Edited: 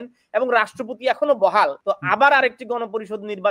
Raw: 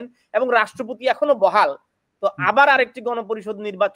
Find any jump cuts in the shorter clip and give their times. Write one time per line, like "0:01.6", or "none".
0:01.8